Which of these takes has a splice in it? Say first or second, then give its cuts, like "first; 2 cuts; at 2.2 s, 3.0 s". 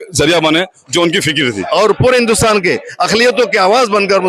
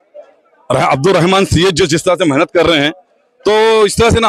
first; 1 cut; at 1.6 s